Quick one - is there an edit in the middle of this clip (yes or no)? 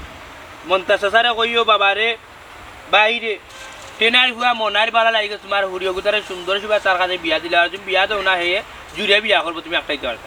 no